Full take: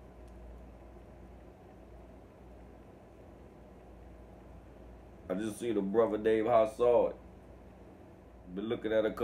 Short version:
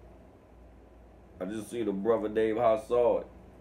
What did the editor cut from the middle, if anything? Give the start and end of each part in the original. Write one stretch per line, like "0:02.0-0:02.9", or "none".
0:02.8-0:04.8